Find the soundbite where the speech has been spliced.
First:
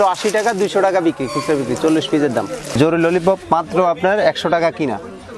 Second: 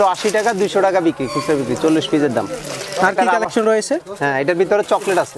first; 1 cut; at 2.7 s

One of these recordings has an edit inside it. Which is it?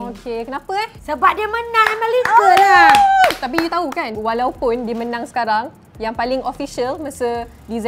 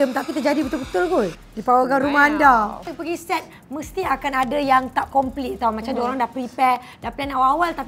second; 2 cuts; at 1.5 s, 2.9 s

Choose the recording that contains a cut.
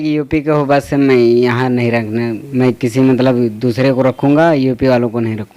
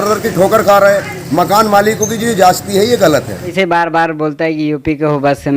second; 1 cut; at 3.5 s

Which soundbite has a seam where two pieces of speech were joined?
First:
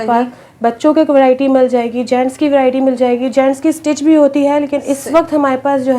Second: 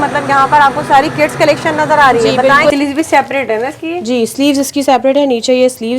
second; 1 cut; at 2.7 s

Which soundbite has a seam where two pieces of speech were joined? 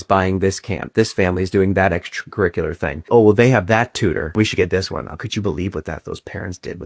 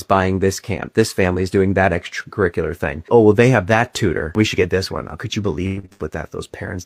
first; 1 cut; at 5.7 s

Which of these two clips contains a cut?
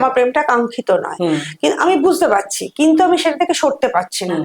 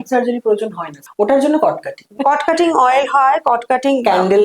second; 1 cut; at 2.2 s

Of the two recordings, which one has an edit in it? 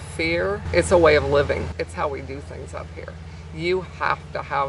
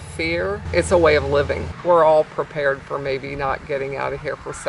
second; 1 cut; at 1.7 s

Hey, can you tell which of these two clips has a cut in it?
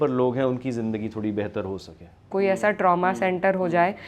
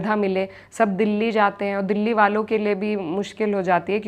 first; 1 cut; at 2.3 s

